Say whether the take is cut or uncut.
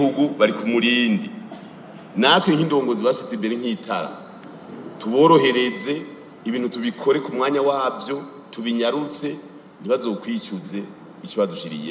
uncut